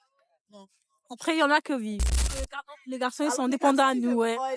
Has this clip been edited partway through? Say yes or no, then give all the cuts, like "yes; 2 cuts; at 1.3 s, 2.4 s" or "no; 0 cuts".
yes; 1 cut; at 2.2 s